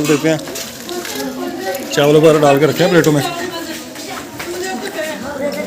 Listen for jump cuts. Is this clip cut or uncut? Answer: uncut